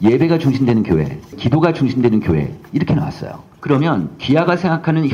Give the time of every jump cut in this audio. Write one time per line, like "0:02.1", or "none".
0:01.4
0:03.5